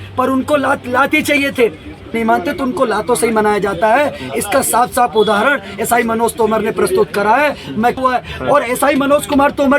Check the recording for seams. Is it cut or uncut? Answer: cut